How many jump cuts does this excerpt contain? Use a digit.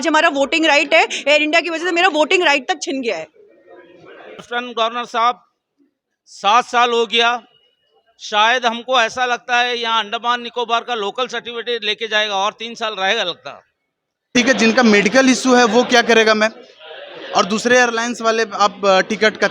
2